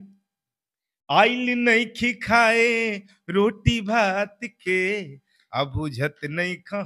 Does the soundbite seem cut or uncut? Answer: uncut